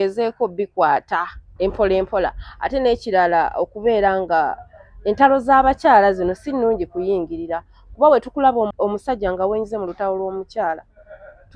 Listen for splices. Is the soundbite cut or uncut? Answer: cut